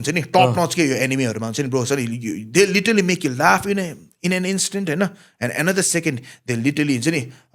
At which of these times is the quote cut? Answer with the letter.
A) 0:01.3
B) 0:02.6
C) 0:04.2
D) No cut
D